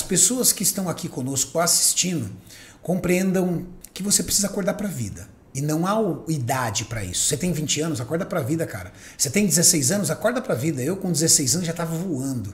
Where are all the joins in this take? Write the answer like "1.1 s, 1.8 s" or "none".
3.7 s